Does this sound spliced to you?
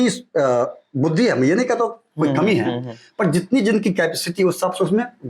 no; 0 cuts

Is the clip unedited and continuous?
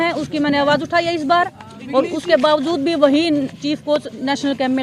yes; 0 cuts

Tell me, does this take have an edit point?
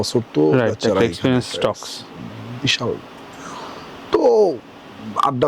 no; 0 cuts

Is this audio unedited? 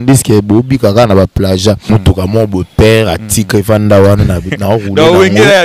no; 1 cut; at 1.8 s

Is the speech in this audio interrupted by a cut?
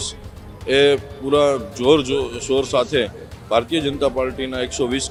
no; 0 cuts

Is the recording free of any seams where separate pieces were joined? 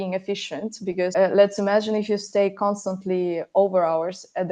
no; 1 cut; at 1.1 s

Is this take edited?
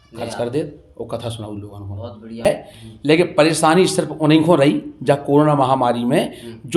yes; 1 cut; at 2.5 s

